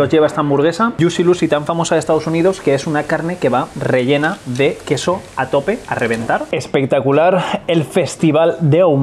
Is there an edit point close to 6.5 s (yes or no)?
yes